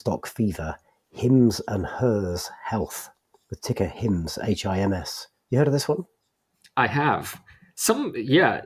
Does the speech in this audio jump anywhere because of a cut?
no; 0 cuts

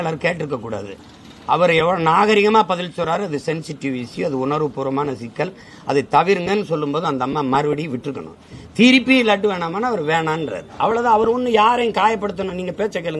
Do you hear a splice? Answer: no; 0 cuts

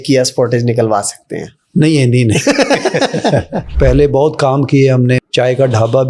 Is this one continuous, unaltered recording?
no; 2 cuts; at 3.7 s, 5.2 s

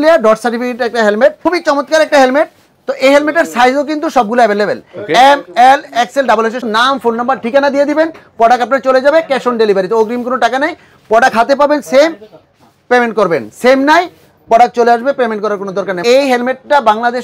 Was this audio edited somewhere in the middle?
yes; 3 cuts; at 1.4 s, 6.6 s, 16.0 s

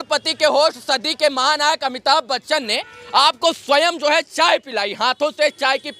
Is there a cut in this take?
no; 0 cuts

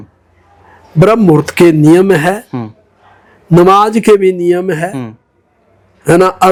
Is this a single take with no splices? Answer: yes; 0 cuts

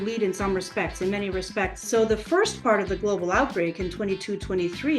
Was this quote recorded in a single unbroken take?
no; 1 cut; at 1.8 s

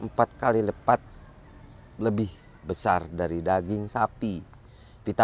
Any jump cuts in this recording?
no; 0 cuts

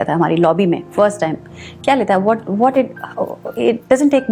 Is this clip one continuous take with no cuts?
yes; 0 cuts

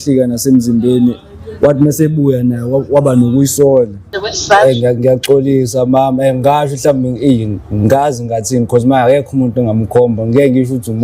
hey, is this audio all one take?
no; 1 cut; at 4.2 s

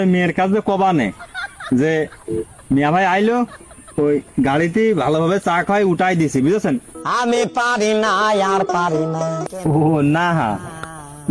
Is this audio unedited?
no; 1 cut; at 9.4 s

